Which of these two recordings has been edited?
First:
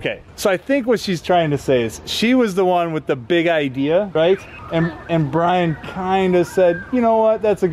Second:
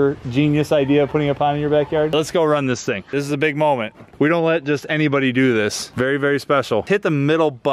second; 3 cuts; at 2.1 s, 5.8 s, 6.8 s

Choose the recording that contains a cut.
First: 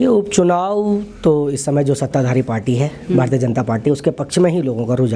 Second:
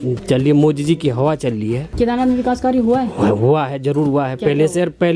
second; 1 cut; at 1.8 s

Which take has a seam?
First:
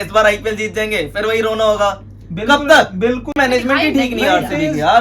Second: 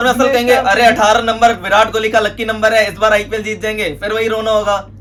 first; 1 cut; at 3.3 s

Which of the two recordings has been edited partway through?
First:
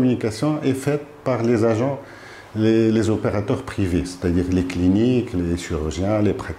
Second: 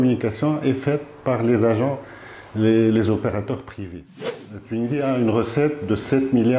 second; 1 cut; at 4.2 s

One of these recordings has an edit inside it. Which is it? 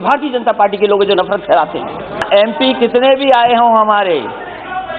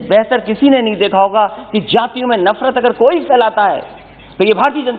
first; 1 cut; at 2.2 s

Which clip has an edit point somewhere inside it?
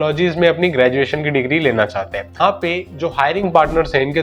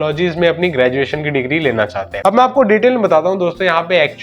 second; 1 cut; at 2.0 s

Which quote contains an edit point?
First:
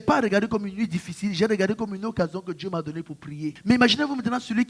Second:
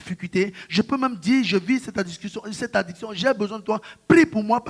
first; 1 cut; at 3.6 s

